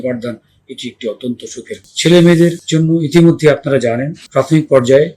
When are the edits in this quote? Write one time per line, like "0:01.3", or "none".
0:01.9
0:02.6
0:04.2